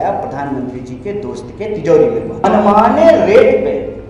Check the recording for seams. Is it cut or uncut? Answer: cut